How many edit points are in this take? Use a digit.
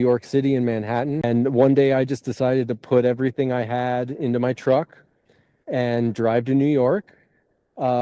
1